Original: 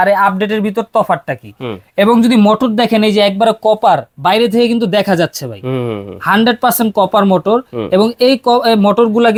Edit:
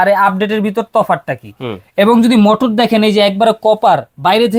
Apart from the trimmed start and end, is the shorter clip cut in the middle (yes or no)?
no